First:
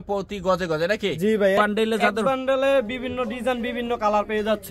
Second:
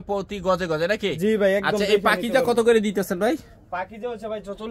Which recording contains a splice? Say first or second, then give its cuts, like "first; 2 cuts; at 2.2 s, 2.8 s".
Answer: first; 1 cut; at 1.6 s